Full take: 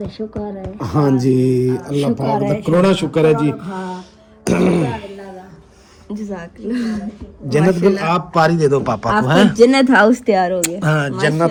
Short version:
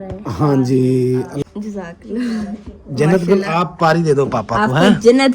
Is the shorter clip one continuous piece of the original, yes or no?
no